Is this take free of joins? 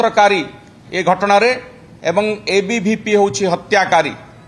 yes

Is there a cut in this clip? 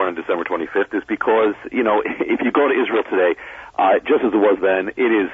no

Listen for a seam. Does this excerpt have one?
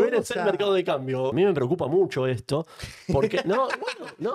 yes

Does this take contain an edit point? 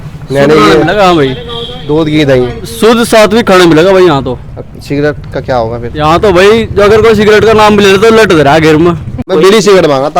yes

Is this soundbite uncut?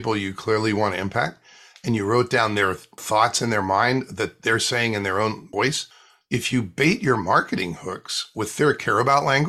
no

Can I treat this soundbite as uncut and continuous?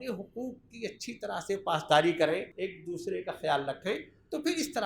no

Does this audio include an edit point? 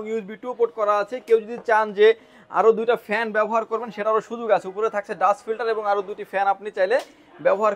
no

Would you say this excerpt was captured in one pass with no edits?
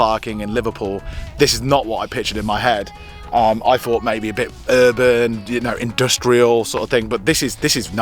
yes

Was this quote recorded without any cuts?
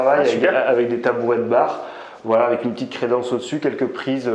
yes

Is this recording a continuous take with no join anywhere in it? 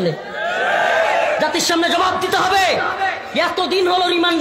yes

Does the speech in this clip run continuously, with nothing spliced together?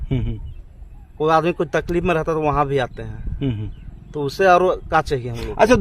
yes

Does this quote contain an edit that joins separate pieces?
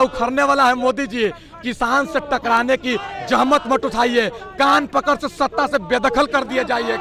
no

